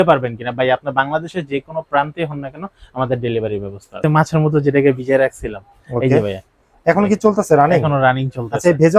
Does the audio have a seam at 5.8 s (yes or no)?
no